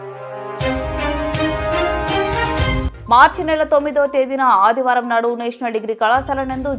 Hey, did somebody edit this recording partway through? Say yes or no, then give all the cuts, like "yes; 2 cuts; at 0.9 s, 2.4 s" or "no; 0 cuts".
yes; 1 cut; at 2.8 s